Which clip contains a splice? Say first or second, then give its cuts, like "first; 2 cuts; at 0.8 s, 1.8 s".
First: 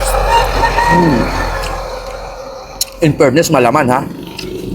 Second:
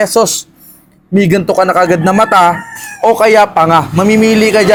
first; 1 cut; at 1.4 s